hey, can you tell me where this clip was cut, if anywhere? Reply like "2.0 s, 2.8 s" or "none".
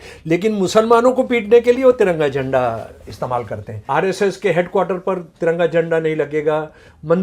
3.8 s